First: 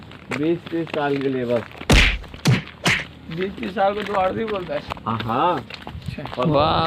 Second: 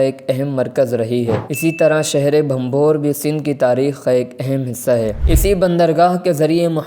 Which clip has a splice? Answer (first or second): second